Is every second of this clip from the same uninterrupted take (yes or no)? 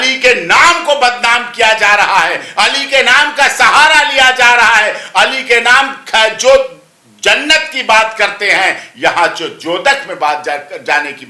yes